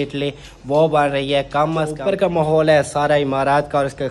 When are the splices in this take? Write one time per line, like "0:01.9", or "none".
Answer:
0:01.9

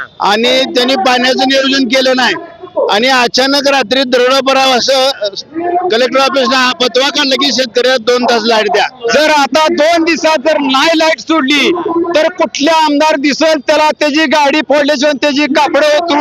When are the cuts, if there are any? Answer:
0:09.0

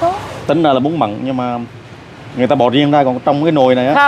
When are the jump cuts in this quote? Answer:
none

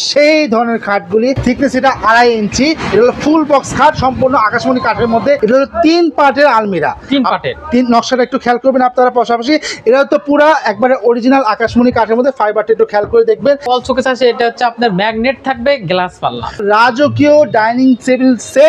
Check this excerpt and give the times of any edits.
0:01.4
0:05.4
0:13.7
0:16.6

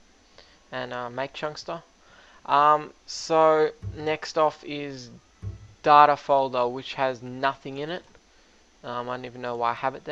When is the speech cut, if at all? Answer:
0:07.6

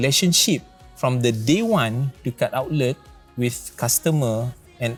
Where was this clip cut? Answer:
none

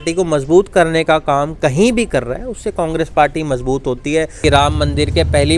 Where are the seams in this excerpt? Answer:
0:04.4

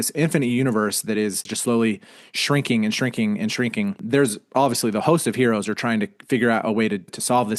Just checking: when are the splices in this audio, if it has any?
0:01.5
0:04.0

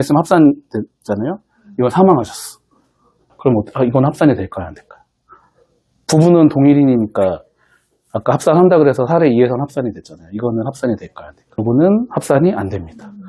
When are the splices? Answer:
none

